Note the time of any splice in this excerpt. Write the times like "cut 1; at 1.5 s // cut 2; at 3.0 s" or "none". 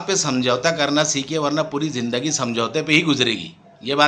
none